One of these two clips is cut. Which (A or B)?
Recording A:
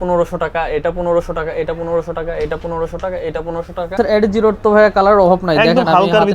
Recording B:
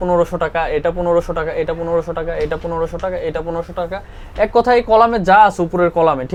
A